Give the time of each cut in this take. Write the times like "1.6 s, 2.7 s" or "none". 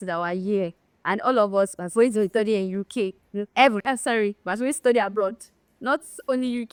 none